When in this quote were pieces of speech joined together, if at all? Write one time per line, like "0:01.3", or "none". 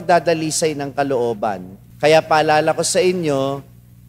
0:01.7